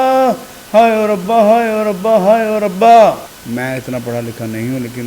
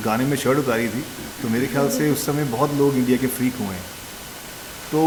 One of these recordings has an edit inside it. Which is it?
first; 1 cut; at 3.3 s

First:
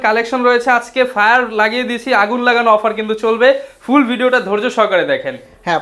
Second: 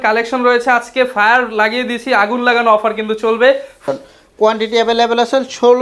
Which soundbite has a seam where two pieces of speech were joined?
second; 1 cut; at 3.8 s

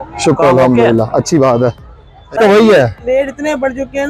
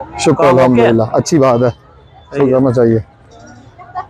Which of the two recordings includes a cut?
first; 1 cut; at 2.4 s

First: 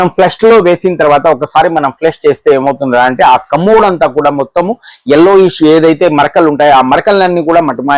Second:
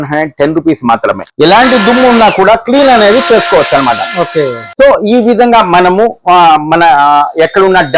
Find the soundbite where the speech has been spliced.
second; 1 cut; at 1.2 s

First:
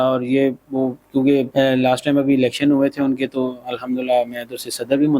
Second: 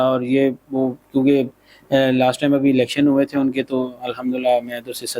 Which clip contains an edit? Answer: first; 1 cut; at 1.5 s

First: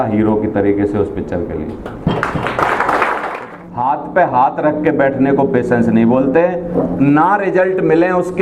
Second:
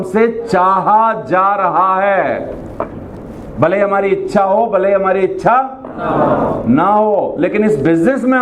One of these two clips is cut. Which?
first; 1 cut; at 3.4 s

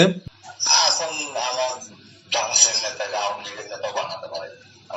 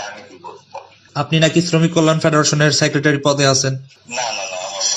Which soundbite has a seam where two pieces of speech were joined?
second; 1 cut; at 1.0 s

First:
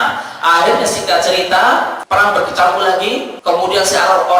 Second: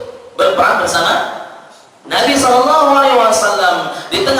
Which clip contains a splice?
first; 2 cuts; at 2.0 s, 3.3 s

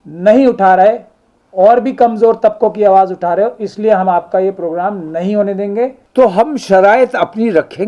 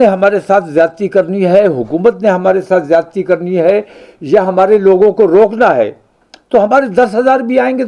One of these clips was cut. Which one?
first; 1 cut; at 6.0 s

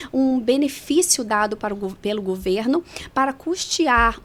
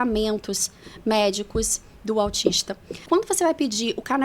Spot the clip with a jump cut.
second; 1 cut; at 3.1 s

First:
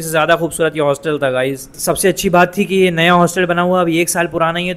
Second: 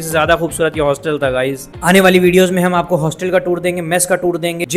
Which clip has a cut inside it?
second; 1 cut; at 1.7 s

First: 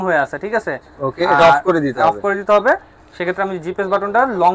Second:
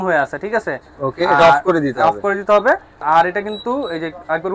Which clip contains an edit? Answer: second; 1 cut; at 3.0 s

